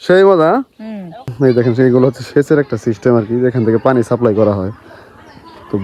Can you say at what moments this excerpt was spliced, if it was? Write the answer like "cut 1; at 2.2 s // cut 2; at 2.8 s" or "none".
cut 1; at 1.3 s